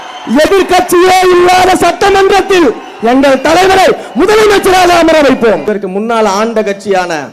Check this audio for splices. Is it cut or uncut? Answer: cut